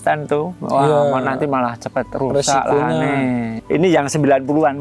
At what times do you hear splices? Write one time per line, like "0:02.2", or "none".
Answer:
0:03.5